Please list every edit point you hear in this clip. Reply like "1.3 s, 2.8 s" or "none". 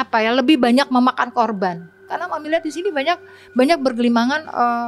2.1 s

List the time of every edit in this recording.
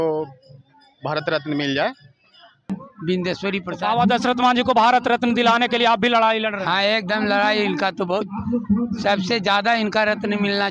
2.7 s

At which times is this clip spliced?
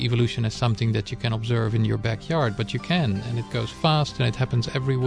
3.5 s

